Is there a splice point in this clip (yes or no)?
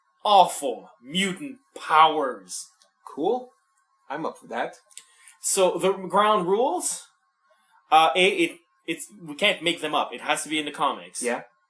no